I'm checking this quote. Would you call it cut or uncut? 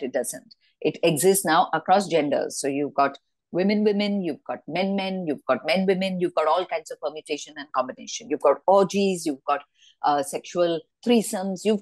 uncut